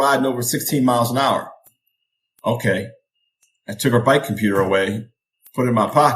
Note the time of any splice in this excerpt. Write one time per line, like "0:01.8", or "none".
none